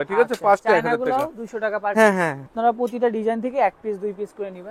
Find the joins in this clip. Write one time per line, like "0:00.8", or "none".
0:02.5